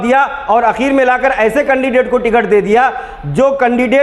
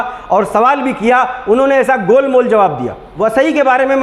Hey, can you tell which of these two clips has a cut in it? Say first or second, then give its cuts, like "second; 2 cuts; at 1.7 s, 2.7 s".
second; 1 cut; at 3.0 s